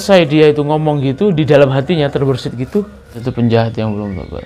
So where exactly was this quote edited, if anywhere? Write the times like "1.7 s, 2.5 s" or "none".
3.3 s